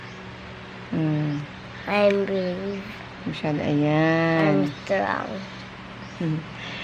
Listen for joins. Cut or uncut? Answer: uncut